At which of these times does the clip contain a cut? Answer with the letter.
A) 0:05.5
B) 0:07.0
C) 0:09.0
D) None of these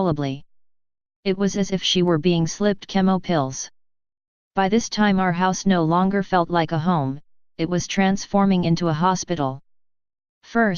C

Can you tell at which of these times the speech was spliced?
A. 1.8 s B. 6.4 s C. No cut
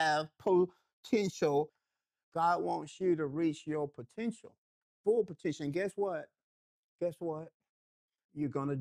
A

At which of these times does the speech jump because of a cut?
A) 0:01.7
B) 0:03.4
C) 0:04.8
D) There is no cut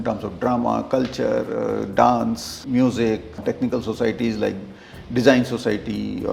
B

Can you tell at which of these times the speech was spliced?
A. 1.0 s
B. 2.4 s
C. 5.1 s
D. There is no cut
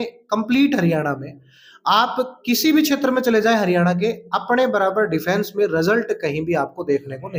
D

